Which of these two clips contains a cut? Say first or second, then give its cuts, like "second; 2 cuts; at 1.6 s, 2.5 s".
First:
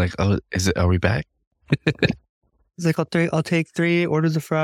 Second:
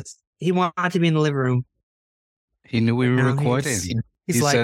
first; 1 cut; at 1.5 s